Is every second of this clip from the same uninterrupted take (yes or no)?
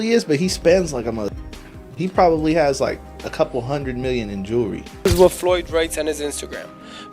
no